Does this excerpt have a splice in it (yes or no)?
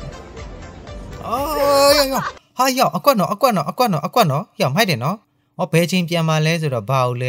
no